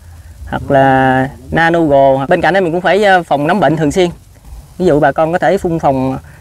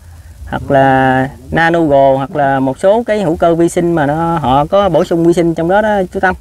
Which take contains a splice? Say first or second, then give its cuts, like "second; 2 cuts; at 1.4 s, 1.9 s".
first; 2 cuts; at 2.2 s, 4.5 s